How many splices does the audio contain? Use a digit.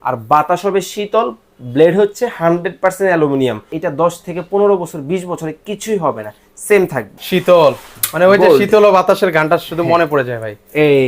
2